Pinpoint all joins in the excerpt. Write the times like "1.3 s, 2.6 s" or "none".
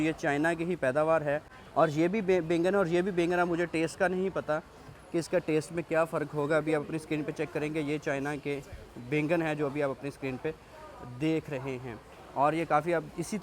none